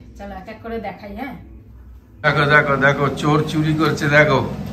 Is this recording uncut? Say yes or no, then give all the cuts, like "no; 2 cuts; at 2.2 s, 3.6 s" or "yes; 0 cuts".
no; 1 cut; at 2.0 s